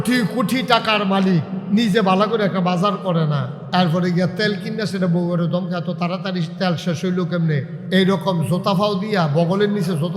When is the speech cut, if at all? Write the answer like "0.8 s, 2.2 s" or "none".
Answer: 1.6 s, 3.5 s, 7.8 s